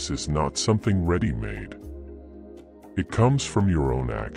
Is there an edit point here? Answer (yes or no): yes